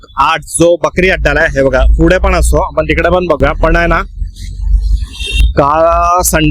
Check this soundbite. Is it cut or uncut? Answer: uncut